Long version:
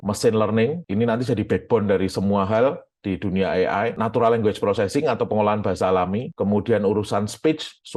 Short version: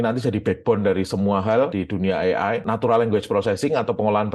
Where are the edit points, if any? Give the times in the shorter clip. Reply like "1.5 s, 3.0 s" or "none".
1.8 s